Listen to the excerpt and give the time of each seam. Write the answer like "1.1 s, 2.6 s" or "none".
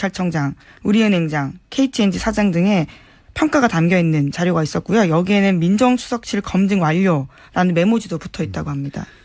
none